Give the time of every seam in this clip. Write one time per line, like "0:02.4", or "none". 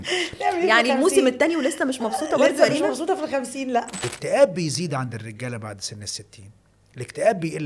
0:04.0